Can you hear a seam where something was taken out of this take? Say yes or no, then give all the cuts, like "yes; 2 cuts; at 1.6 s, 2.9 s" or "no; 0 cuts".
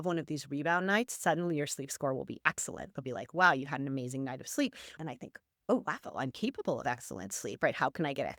yes; 1 cut; at 4.9 s